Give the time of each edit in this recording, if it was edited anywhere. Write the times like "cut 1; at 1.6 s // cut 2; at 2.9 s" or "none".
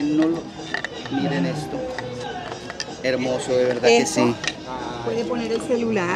none